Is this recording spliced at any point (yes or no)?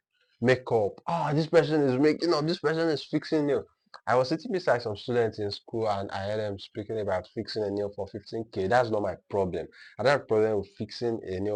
no